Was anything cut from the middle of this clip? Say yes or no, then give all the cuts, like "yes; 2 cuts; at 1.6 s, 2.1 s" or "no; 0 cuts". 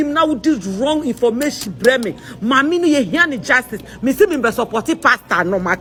no; 0 cuts